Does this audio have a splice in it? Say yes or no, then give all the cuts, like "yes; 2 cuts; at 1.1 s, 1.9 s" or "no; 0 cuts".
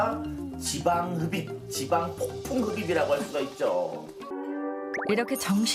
yes; 1 cut; at 4.3 s